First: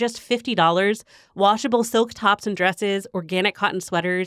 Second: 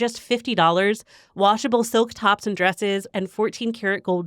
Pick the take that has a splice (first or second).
second